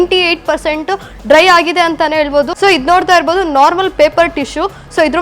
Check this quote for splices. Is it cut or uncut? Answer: cut